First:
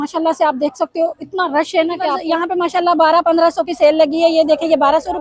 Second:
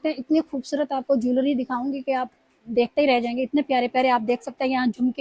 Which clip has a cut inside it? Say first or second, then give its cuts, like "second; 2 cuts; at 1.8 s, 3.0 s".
first; 1 cut; at 2.2 s